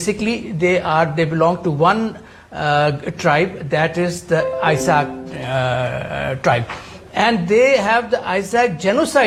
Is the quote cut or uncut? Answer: uncut